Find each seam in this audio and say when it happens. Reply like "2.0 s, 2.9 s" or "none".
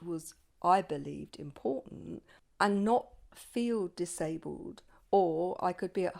2.4 s